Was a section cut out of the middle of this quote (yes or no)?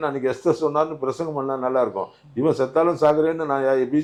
no